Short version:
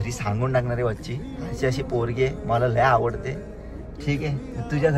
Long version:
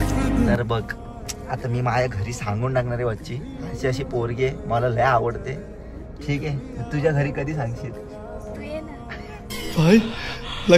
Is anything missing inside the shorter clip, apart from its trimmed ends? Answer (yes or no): no